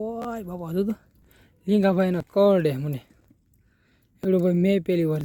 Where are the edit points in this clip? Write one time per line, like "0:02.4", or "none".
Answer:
none